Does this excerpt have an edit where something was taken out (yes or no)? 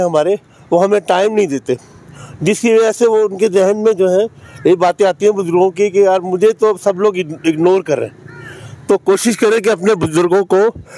no